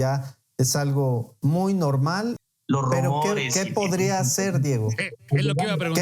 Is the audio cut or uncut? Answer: cut